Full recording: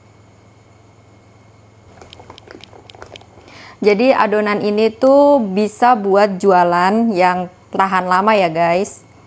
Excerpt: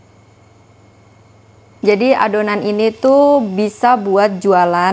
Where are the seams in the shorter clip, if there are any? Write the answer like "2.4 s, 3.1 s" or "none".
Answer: 1.7 s

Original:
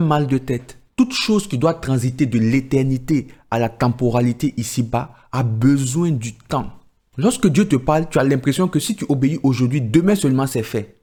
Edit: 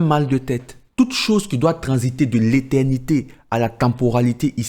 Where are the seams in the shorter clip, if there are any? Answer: none

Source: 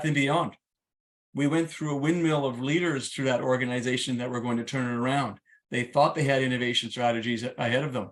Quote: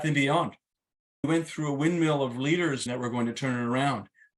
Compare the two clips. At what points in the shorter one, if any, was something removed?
1.3 s, 2.9 s

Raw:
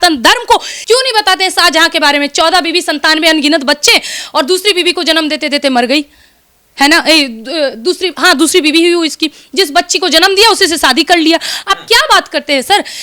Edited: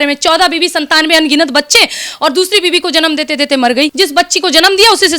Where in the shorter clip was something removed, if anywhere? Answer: 3.9 s

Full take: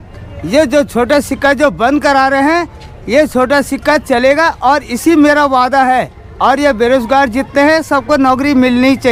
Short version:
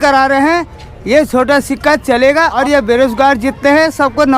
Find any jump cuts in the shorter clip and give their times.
2.6 s

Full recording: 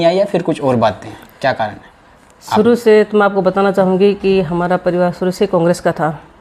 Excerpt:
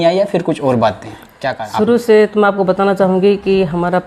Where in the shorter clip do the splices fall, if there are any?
1.6 s

